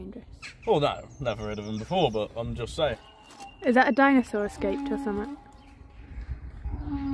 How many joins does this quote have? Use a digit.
1